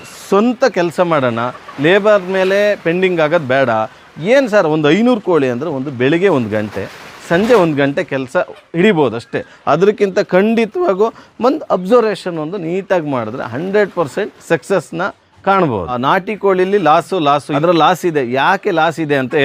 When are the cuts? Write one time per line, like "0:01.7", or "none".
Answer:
none